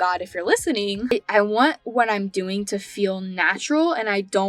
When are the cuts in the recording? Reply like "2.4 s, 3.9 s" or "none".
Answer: 1.1 s